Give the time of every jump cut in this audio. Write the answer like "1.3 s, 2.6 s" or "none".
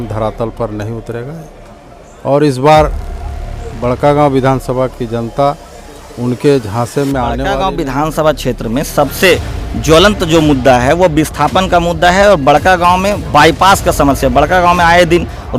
7.5 s

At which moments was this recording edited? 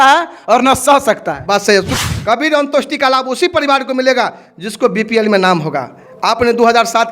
1.9 s

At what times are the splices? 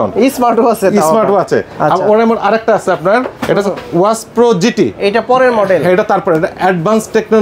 none

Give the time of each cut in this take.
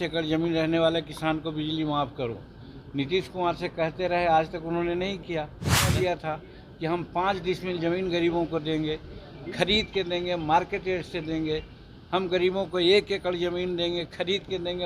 5.9 s

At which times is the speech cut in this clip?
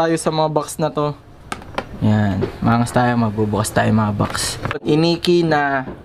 4.7 s

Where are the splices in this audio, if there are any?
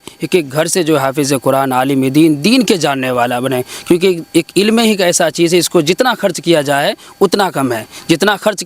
none

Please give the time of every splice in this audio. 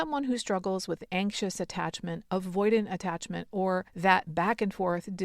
3.9 s

